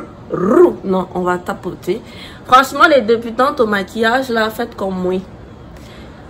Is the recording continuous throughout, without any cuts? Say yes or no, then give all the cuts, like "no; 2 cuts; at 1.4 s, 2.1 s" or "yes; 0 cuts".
yes; 0 cuts